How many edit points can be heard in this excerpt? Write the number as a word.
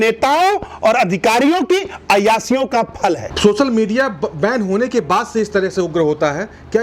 zero